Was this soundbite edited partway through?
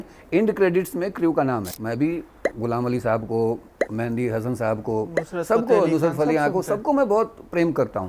yes; 2 cuts; at 1.7 s, 3.7 s

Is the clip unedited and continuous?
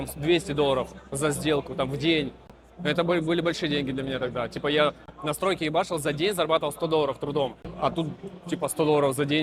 yes; 0 cuts

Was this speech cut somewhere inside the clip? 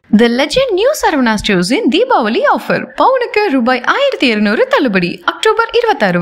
no; 0 cuts

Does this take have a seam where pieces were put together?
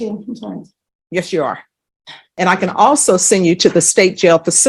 yes; 1 cut; at 2.2 s

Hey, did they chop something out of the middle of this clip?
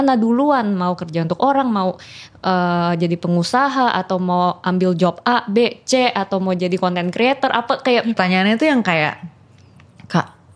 yes; 1 cut; at 8.2 s

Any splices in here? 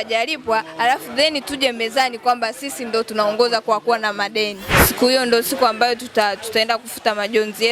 yes; 1 cut; at 4.6 s

